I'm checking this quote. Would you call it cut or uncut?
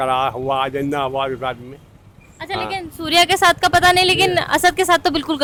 uncut